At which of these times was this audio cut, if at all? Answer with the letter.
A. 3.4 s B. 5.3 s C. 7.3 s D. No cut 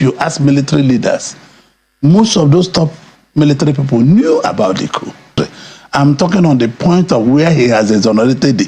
B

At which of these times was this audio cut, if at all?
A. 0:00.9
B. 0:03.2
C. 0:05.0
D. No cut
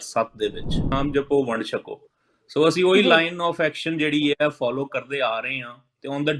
A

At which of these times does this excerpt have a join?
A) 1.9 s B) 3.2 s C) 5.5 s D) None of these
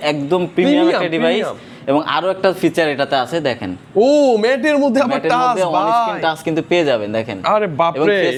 D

